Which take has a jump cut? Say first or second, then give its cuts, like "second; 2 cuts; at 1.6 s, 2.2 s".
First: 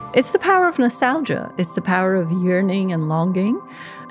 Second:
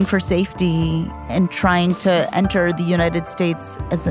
second; 1 cut; at 1.1 s